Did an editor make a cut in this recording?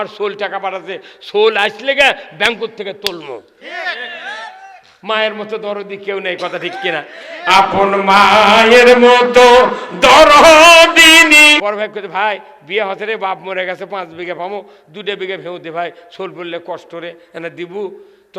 yes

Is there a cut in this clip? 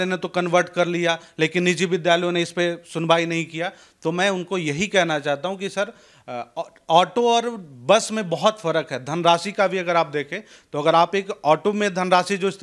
no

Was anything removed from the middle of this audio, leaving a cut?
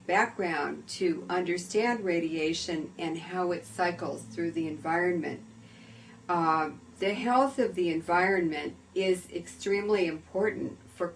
no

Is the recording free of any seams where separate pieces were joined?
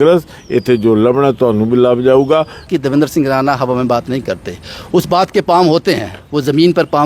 no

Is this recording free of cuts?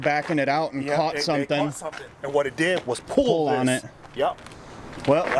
yes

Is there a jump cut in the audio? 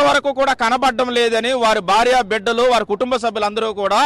yes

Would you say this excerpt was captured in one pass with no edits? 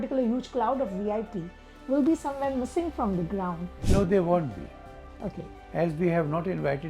yes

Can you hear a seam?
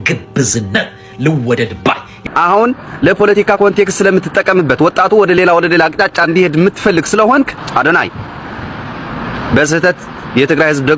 no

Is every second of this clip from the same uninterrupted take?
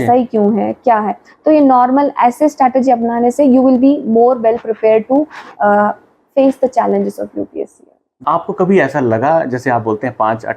no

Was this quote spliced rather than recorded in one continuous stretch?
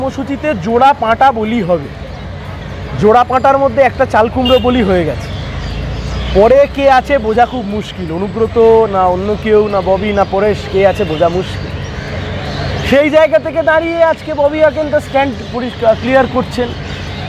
no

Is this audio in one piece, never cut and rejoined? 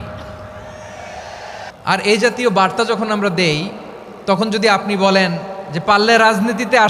no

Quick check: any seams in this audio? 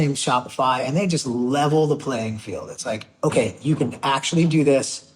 no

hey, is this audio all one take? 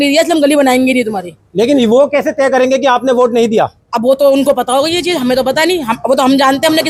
yes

